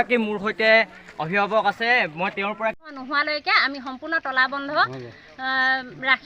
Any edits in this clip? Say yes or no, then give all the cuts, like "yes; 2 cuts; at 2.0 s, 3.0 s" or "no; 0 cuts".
yes; 1 cut; at 3.0 s